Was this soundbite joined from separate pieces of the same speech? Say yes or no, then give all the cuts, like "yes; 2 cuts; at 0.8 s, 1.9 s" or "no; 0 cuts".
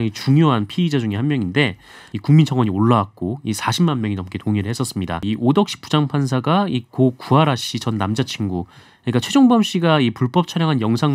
yes; 2 cuts; at 2.0 s, 5.2 s